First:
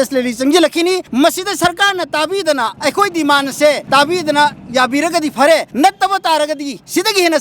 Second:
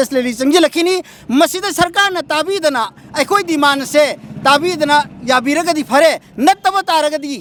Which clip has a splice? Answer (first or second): first